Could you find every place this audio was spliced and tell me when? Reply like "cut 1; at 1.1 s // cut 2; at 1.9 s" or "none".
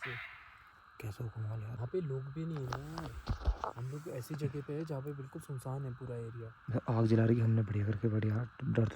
cut 1; at 1.8 s